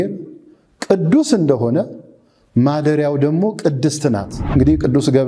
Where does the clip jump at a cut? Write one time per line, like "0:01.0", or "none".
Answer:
0:04.4

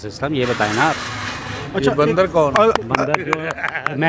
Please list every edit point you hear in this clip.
none

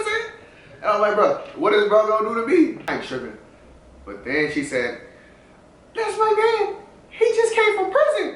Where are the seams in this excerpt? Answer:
0:02.8

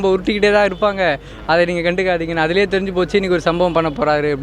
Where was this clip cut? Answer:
none

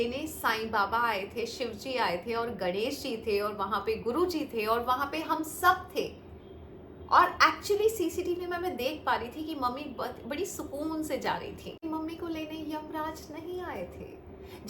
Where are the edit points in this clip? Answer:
0:11.8

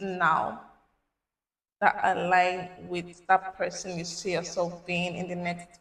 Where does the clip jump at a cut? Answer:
none

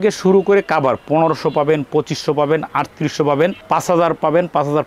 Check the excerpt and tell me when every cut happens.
none

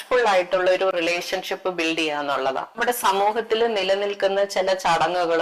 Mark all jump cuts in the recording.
0:02.8

